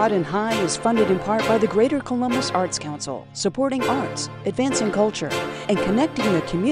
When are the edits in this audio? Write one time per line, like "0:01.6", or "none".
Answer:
none